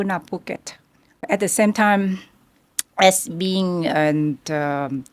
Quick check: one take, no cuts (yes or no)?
no